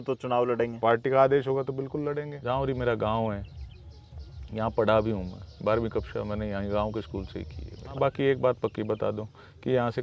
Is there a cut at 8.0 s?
yes; 2 cuts; at 2.3 s, 8.0 s

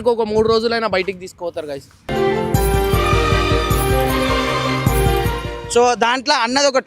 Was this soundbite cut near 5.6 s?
yes; 1 cut; at 5.6 s

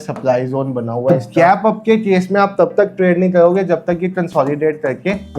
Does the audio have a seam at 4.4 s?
no; 1 cut; at 1.3 s

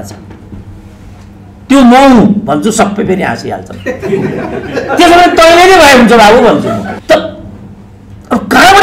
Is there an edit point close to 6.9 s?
yes; 1 cut; at 6.9 s

